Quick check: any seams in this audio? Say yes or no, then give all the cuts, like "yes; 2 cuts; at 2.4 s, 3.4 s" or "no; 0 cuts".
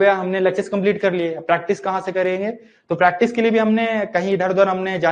no; 0 cuts